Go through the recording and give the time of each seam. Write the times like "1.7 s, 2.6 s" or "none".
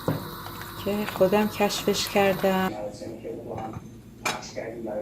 2.7 s